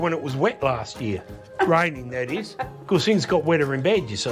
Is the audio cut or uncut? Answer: uncut